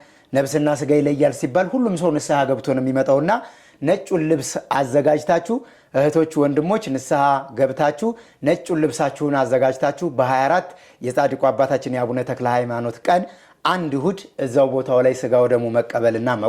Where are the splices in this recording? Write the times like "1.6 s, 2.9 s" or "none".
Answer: none